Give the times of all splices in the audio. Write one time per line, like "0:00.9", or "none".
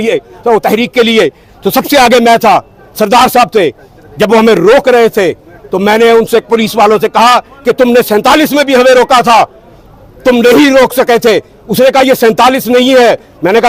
none